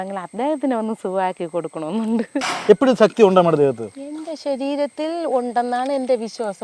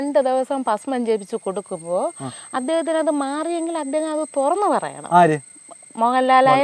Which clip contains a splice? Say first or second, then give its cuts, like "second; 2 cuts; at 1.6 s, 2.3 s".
first; 1 cut; at 2.5 s